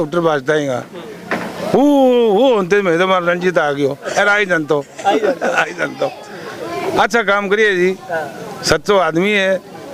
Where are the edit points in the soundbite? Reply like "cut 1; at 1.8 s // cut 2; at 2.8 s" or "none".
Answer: none